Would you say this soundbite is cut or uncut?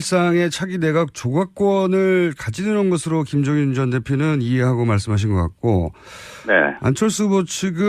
cut